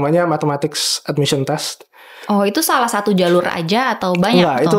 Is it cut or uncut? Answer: uncut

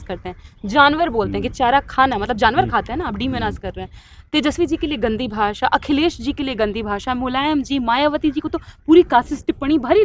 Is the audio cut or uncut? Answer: uncut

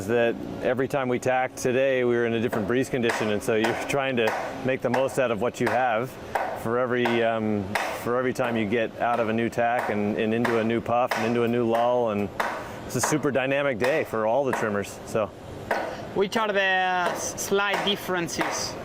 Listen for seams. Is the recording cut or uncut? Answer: uncut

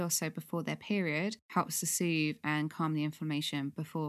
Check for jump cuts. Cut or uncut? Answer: cut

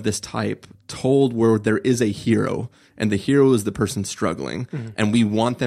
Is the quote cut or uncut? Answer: uncut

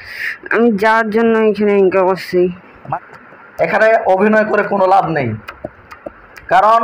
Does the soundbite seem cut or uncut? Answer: cut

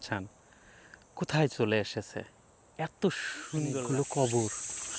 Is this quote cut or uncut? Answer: cut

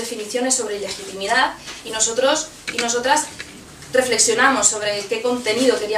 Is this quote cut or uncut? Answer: cut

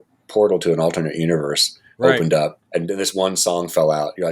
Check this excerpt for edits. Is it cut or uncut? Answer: cut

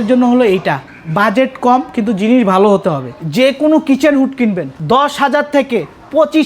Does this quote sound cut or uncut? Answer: cut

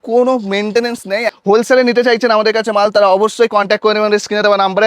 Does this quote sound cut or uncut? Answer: cut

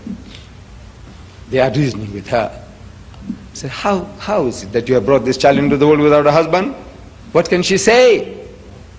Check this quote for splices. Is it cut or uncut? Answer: cut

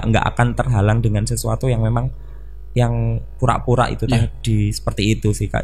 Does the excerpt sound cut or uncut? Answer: uncut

